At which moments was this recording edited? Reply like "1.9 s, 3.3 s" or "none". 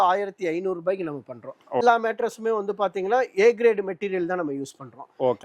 1.8 s